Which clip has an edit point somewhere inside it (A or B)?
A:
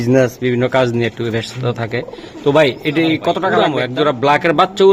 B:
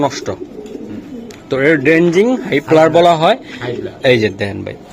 A